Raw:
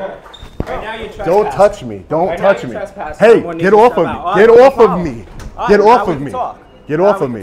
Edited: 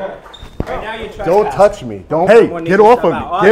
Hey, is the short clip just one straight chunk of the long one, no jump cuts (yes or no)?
no